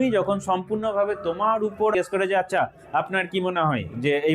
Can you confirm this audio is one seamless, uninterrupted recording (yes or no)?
no